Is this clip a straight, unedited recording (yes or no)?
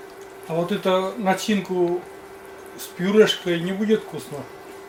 yes